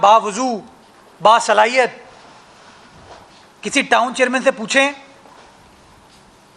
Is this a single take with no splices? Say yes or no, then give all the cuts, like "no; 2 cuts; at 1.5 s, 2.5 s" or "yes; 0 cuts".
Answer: yes; 0 cuts